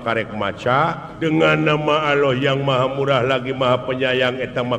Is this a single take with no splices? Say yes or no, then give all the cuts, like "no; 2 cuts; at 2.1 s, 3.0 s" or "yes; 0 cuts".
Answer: no; 1 cut; at 1.1 s